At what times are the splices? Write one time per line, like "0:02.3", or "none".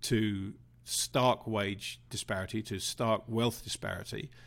none